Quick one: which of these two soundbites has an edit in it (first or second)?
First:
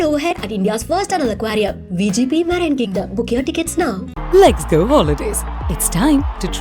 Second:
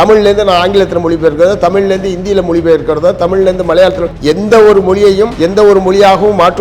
second